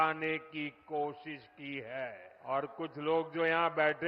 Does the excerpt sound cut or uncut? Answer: cut